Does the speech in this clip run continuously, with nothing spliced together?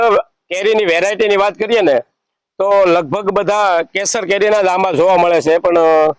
yes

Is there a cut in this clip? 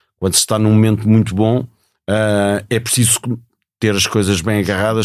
no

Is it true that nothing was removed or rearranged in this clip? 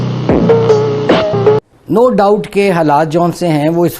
no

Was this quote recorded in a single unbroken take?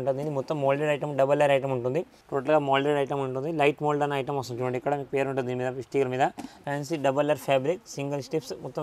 no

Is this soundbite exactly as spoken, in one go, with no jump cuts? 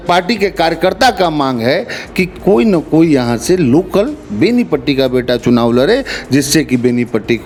yes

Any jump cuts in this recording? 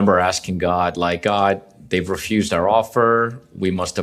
no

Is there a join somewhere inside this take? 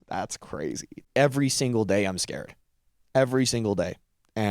yes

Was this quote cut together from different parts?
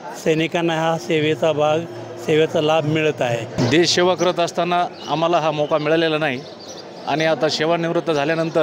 yes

